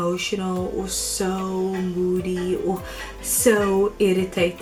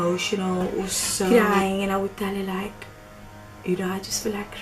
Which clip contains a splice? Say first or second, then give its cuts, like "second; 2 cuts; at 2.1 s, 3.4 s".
second; 1 cut; at 1.3 s